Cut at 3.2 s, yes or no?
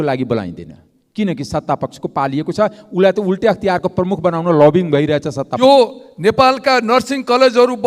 no